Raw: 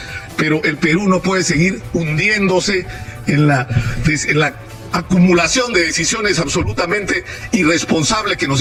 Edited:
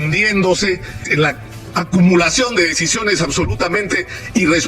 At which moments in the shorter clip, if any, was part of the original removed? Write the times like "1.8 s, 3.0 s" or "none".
1.1 s